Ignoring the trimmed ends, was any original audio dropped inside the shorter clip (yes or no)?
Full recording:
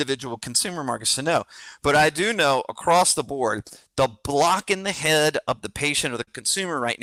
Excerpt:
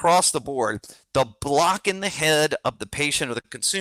no